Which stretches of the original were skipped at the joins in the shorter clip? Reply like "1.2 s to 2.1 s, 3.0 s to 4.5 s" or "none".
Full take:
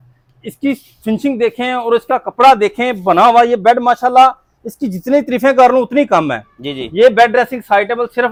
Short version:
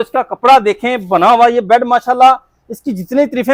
none